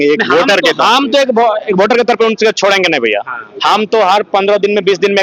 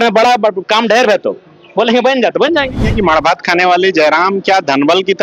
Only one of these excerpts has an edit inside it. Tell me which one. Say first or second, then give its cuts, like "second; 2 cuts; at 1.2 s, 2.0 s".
second; 1 cut; at 2.9 s